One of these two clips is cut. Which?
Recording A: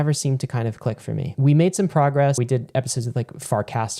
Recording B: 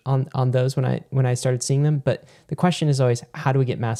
A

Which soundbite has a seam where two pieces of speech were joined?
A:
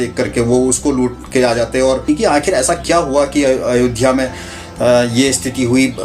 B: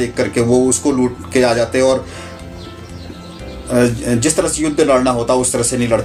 A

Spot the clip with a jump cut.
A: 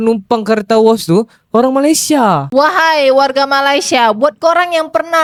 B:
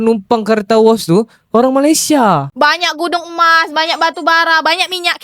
B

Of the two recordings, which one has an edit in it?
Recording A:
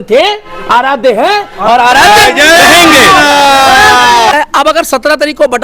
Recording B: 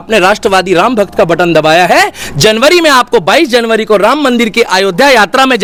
A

